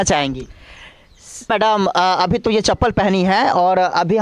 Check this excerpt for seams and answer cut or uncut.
cut